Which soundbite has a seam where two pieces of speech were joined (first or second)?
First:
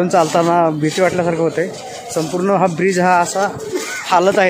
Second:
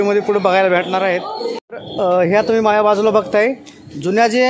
second